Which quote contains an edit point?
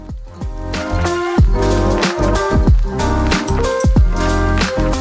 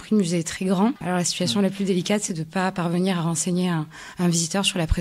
second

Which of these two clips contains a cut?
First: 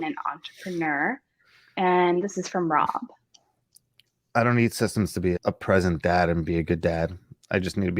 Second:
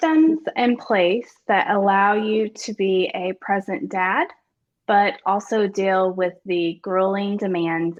first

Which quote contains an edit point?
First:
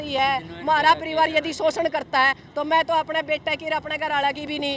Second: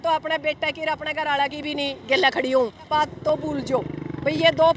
second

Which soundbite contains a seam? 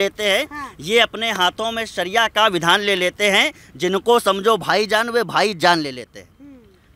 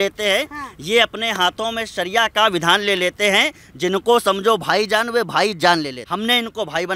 second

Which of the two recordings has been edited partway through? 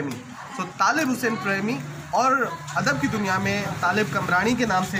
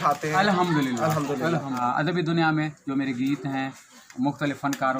second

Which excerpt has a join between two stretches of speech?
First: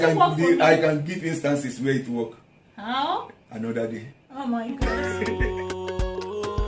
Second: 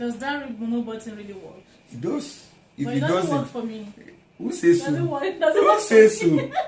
first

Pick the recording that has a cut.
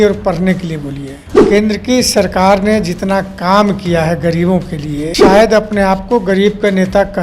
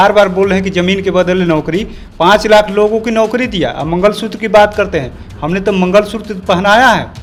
first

